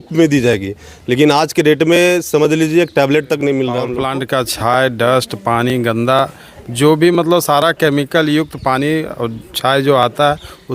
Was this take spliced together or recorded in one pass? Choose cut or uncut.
cut